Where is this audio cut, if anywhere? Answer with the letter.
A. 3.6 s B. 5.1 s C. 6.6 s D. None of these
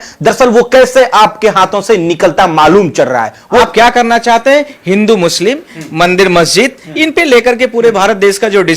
A